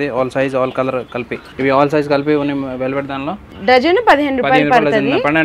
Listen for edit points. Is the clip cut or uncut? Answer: cut